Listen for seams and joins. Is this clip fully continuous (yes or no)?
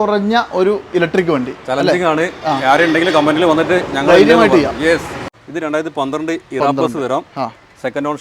no